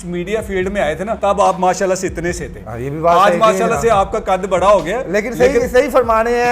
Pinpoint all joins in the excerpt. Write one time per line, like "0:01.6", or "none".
0:01.2